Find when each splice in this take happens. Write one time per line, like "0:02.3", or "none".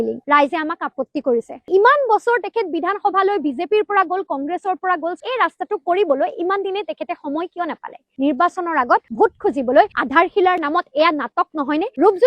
0:01.7
0:05.2
0:08.0